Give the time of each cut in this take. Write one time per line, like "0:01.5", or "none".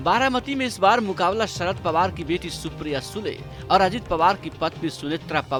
none